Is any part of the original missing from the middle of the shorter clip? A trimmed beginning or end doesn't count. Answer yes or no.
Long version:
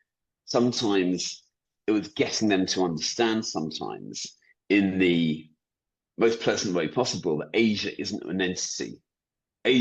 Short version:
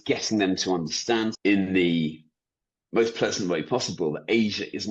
yes